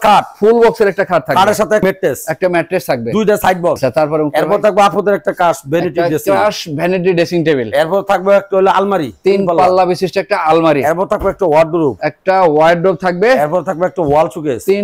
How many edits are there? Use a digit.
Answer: 2